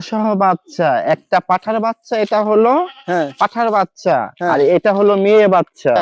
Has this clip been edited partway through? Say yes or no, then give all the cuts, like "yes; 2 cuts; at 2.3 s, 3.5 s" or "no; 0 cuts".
no; 0 cuts